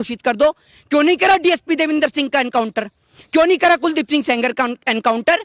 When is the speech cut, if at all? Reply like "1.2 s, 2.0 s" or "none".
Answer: none

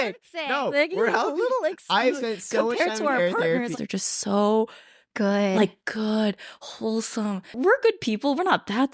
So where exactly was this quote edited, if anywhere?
3.7 s, 7.6 s

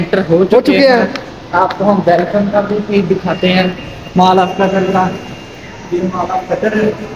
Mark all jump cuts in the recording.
none

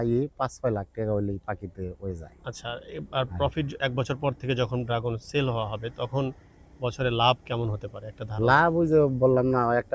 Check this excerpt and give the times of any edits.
none

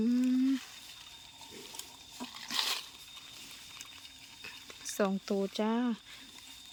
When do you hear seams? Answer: none

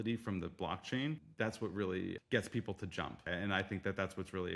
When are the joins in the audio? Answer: 1.3 s, 2.2 s, 3.2 s

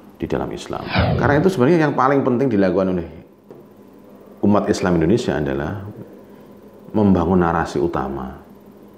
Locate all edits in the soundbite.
1.0 s

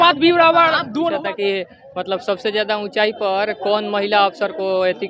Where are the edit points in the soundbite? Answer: 1.1 s

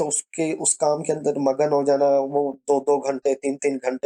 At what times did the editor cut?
none

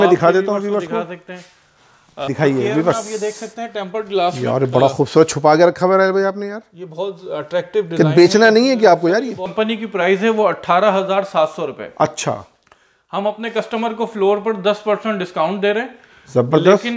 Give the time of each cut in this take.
2.3 s, 9.5 s

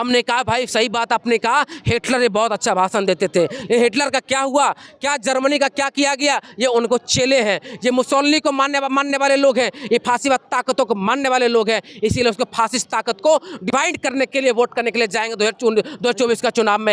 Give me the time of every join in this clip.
none

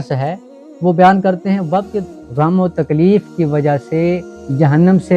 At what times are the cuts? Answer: 2.0 s

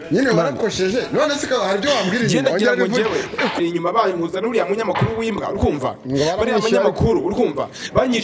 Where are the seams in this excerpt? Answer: 3.6 s

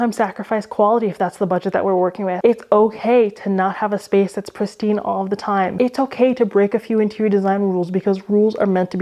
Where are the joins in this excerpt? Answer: 2.4 s, 5.7 s

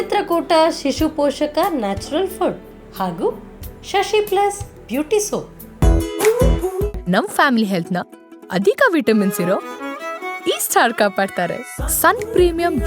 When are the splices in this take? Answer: 5.6 s

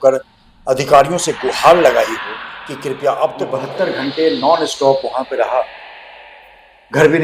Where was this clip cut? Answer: 3.6 s

